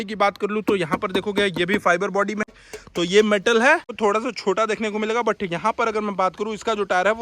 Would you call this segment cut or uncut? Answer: cut